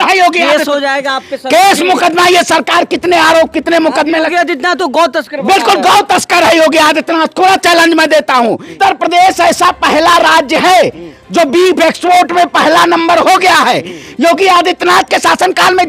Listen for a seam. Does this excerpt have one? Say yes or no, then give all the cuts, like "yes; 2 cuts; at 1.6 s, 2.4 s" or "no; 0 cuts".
yes; 2 cuts; at 8.7 s, 14.0 s